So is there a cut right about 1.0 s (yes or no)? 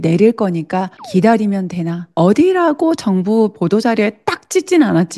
yes